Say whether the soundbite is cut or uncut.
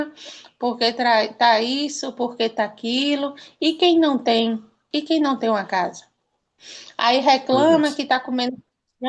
cut